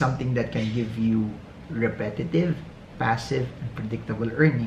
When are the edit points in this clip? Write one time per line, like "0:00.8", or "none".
none